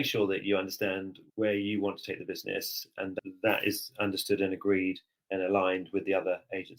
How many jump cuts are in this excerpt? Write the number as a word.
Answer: two